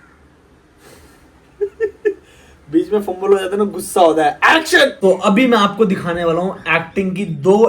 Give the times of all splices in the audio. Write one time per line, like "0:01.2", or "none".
0:05.0